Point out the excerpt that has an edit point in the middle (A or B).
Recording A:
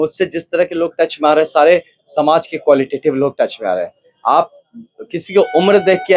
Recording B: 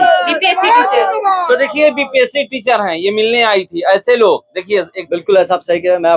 B